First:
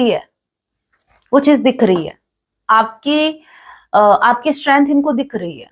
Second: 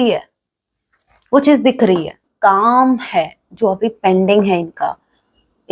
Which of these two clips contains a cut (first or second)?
second